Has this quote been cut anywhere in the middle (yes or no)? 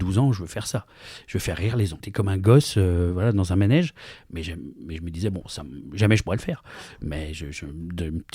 yes